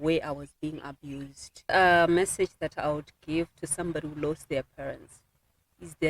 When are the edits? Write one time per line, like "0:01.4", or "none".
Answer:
0:01.7